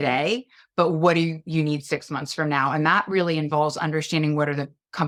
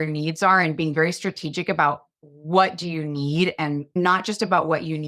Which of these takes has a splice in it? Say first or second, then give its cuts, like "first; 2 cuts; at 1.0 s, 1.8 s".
second; 3 cuts; at 0.9 s, 2.2 s, 4.0 s